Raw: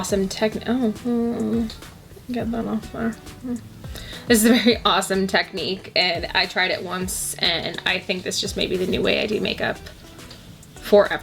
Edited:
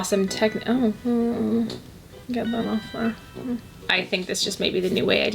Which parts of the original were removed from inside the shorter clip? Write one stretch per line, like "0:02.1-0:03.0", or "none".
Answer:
0:03.8-0:07.8